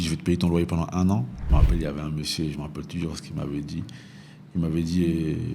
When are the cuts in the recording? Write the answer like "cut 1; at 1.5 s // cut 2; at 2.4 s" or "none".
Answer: cut 1; at 1.5 s